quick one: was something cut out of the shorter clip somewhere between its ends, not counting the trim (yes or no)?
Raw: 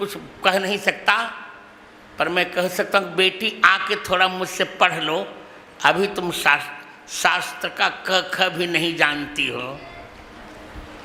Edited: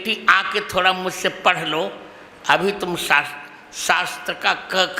no